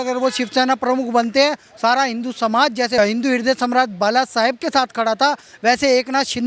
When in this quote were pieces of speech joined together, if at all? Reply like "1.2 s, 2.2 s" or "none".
3.0 s